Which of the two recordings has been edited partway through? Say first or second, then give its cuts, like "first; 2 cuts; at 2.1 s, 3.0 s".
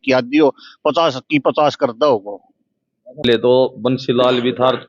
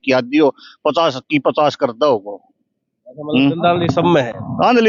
first; 1 cut; at 3.2 s